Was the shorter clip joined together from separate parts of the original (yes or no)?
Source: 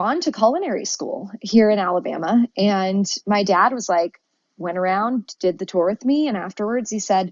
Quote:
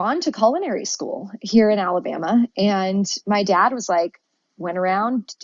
no